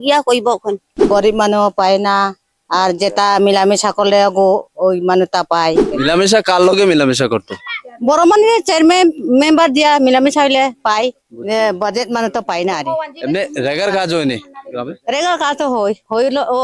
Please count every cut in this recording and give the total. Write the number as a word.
three